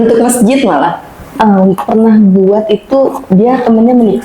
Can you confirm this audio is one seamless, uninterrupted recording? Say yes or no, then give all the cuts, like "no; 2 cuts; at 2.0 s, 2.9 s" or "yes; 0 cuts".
no; 1 cut; at 1.3 s